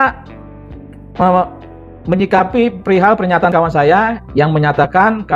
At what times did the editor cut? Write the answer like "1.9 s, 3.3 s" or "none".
none

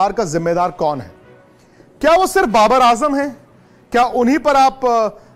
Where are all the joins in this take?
none

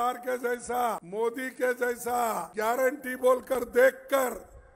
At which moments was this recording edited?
1.0 s, 2.5 s

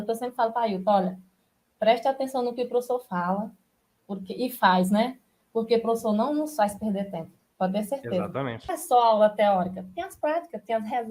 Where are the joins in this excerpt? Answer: 8.8 s

